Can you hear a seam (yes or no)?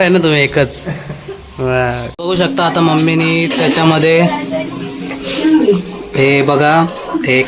yes